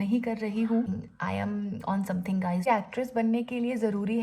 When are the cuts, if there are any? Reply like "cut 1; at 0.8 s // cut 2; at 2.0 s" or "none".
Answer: cut 1; at 0.9 s // cut 2; at 2.6 s